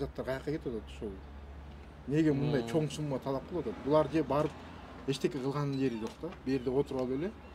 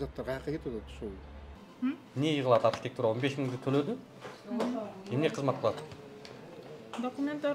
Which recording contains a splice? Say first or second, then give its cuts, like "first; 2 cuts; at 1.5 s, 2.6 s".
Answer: second; 1 cut; at 1.6 s